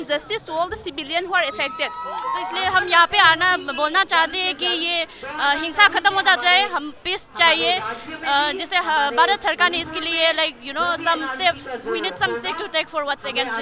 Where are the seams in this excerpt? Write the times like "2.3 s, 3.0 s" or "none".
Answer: 2.3 s

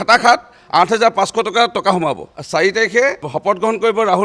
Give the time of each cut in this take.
2.3 s, 3.3 s

